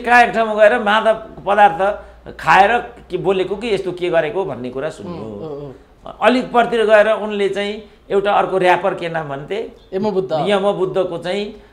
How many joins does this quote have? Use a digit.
0